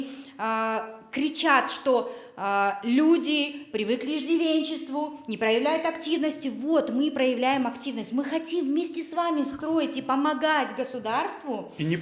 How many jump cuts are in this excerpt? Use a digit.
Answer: 0